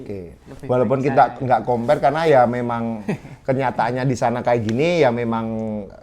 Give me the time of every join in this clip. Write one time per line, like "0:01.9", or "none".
none